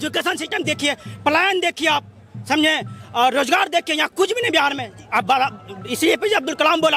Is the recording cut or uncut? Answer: uncut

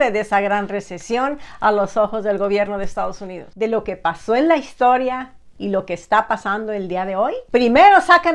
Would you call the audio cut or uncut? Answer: cut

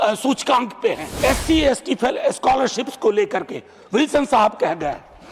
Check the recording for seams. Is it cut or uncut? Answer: cut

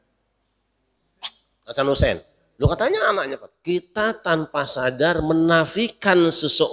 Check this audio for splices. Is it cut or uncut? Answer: cut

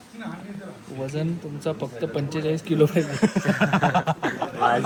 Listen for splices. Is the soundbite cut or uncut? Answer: uncut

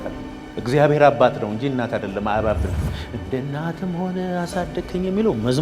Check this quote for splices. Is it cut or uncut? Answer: uncut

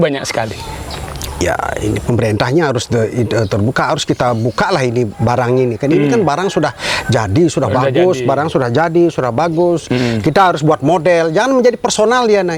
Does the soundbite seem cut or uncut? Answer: uncut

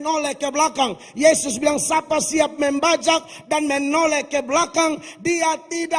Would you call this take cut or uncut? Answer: uncut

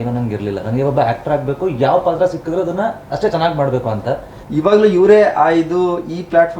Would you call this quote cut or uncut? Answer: cut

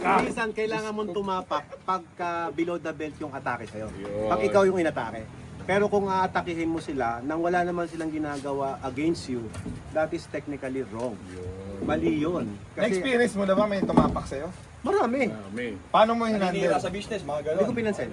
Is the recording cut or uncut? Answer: uncut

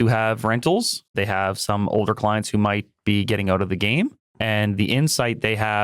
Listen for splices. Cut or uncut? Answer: cut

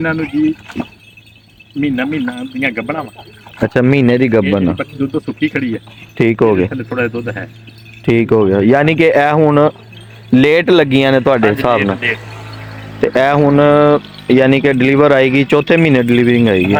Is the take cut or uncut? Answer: uncut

